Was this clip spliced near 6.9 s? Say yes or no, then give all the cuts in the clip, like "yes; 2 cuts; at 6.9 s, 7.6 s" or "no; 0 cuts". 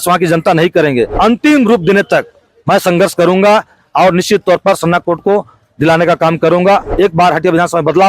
yes; 2 cuts; at 1.1 s, 6.9 s